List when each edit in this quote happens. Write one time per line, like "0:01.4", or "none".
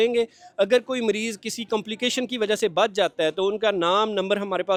none